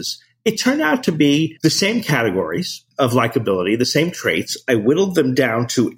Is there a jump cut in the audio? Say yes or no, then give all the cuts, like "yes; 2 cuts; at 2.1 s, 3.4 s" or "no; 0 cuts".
yes; 2 cuts; at 1.5 s, 2.8 s